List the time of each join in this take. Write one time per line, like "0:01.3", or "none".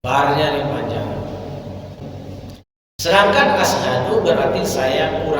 0:02.0